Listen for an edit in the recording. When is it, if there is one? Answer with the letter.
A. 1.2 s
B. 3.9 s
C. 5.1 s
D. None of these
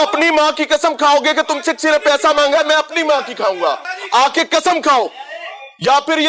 B